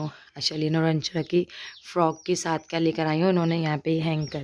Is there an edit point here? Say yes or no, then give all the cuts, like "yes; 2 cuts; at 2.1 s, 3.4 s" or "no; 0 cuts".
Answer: no; 0 cuts